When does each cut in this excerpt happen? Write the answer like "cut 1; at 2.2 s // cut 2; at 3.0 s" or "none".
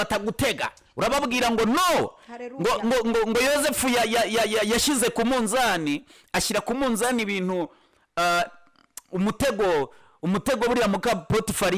none

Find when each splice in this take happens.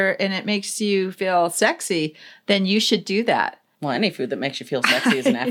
cut 1; at 3.7 s

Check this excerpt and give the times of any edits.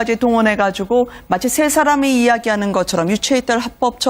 cut 1; at 2.4 s

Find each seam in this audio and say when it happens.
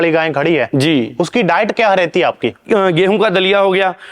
cut 1; at 2.6 s

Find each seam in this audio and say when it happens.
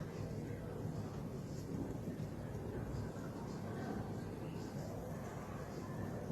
cut 1; at 4.9 s

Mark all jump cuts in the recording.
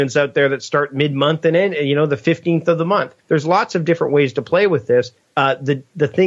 cut 1; at 3.1 s // cut 2; at 5.2 s

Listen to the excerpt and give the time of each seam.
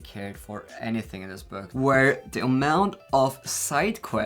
cut 1; at 1.7 s

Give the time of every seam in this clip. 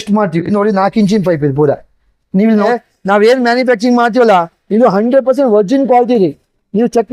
cut 1; at 2.7 s

